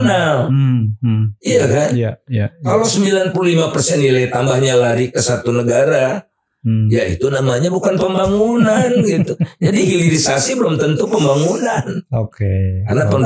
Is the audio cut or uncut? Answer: uncut